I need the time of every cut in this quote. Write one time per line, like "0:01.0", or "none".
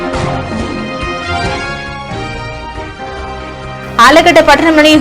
none

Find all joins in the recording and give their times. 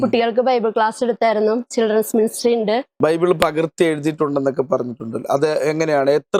0:02.9

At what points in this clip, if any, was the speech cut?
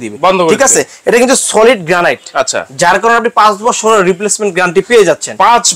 none

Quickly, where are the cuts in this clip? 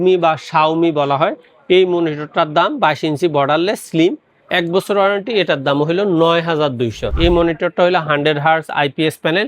0:07.1

